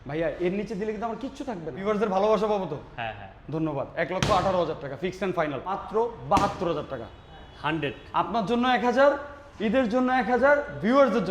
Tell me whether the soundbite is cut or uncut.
cut